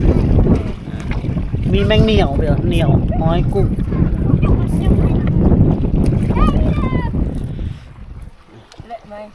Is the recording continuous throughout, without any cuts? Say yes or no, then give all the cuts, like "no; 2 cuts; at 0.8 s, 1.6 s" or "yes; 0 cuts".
yes; 0 cuts